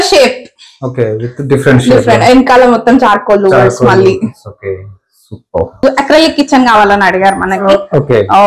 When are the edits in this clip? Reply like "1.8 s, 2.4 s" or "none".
5.8 s